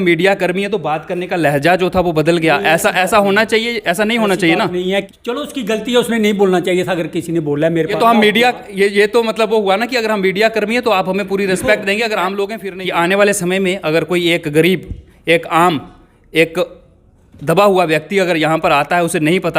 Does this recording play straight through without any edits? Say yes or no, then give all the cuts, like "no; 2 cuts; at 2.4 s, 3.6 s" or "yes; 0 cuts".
no; 3 cuts; at 5.1 s, 7.9 s, 12.6 s